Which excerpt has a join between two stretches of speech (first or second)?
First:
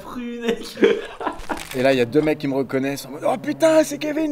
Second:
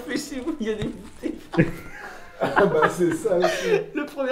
first